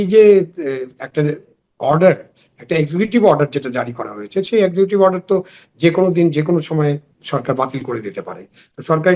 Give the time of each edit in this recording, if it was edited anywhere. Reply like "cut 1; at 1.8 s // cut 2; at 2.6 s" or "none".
none